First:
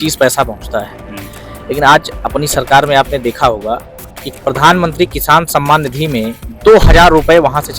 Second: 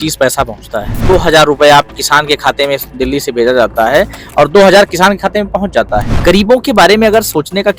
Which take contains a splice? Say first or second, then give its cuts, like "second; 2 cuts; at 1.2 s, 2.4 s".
second; 2 cuts; at 1.0 s, 6.1 s